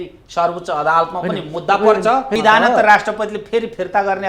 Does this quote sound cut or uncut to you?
cut